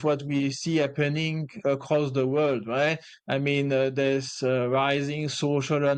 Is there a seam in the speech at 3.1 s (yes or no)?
no